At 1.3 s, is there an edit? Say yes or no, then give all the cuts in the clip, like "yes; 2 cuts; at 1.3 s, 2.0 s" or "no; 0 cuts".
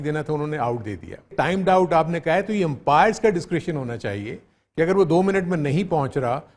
yes; 1 cut; at 1.3 s